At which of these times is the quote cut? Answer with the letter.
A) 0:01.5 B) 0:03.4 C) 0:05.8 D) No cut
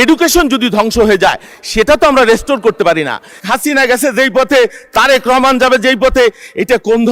B